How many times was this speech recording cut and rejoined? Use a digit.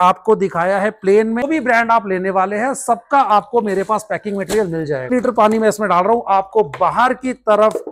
2